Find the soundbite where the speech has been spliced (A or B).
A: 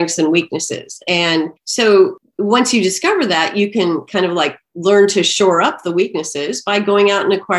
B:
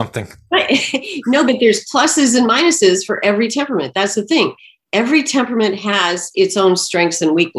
A